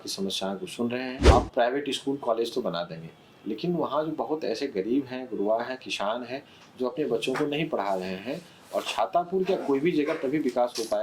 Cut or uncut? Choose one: cut